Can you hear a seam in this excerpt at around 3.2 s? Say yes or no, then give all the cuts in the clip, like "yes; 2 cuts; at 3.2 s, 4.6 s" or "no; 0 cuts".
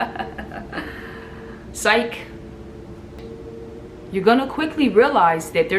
yes; 1 cut; at 3.2 s